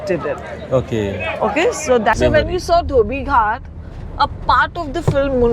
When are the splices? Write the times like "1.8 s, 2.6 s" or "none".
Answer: 2.2 s